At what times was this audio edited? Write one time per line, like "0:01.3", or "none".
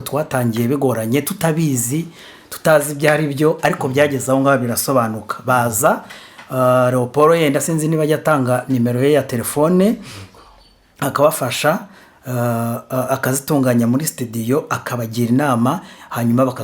none